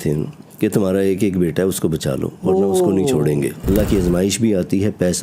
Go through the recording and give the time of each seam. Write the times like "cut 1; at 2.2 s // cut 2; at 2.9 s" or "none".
cut 1; at 3.7 s

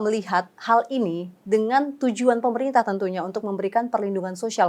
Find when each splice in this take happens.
none

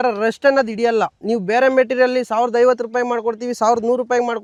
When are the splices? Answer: none

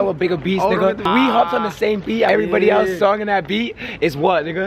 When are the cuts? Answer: cut 1; at 1.1 s // cut 2; at 2.3 s

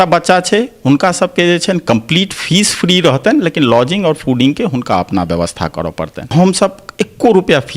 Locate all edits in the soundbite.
cut 1; at 6.3 s

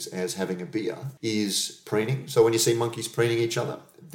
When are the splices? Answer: cut 1; at 1.1 s

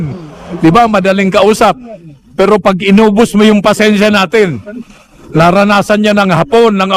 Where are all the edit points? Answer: none

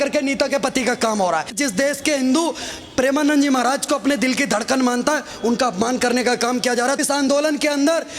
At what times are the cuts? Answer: cut 1; at 1.6 s // cut 2; at 7.0 s

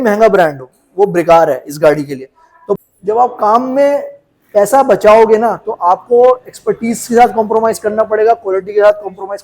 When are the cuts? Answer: cut 1; at 2.8 s

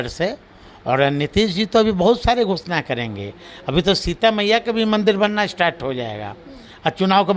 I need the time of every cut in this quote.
none

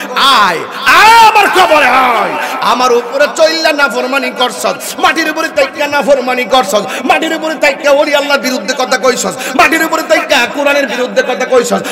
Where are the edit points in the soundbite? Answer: none

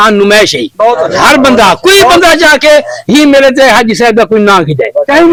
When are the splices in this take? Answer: none

